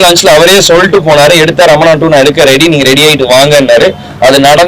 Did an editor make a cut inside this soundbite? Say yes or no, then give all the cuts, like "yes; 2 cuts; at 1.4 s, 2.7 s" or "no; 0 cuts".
no; 0 cuts